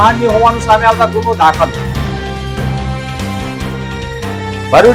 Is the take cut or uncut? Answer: uncut